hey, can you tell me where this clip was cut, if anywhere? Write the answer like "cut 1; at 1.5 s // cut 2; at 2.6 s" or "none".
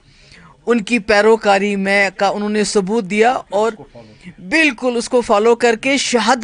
none